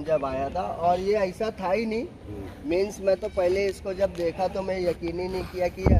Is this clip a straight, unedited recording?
yes; 0 cuts

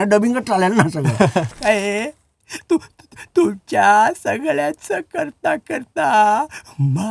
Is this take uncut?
no; 1 cut; at 1.5 s

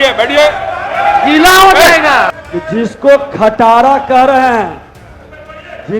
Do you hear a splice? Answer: yes; 1 cut; at 2.4 s

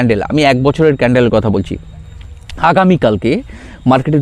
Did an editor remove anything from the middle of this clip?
no; 0 cuts

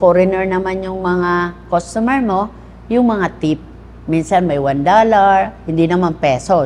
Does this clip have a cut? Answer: no; 0 cuts

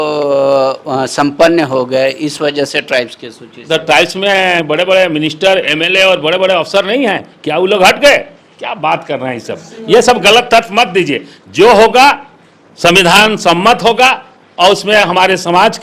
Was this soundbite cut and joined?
no; 0 cuts

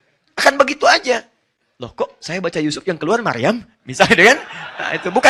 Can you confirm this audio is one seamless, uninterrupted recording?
yes; 0 cuts

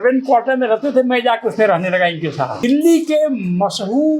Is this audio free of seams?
no; 1 cut; at 2.6 s

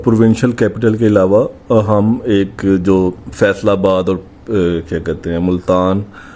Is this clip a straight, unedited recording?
yes; 0 cuts

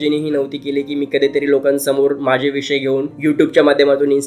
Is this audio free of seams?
yes; 0 cuts

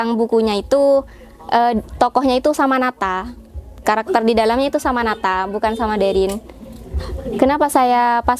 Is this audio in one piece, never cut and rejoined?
yes; 0 cuts

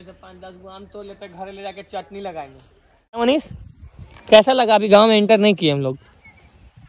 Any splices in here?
yes; 1 cut; at 3.2 s

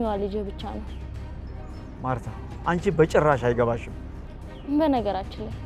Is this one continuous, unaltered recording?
yes; 0 cuts

